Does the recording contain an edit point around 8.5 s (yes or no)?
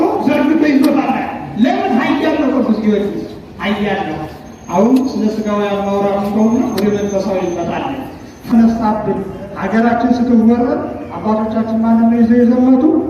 yes